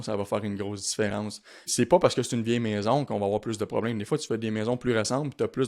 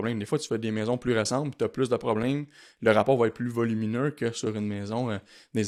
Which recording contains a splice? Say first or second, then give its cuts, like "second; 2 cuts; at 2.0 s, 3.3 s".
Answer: first; 1 cut; at 1.7 s